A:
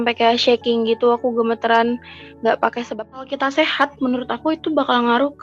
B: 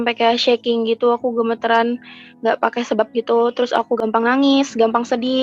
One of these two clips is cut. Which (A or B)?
A